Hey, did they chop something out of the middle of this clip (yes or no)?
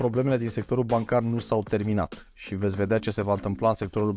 no